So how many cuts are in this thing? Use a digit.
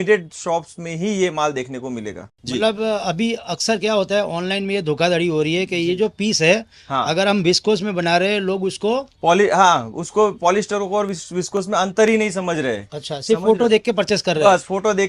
1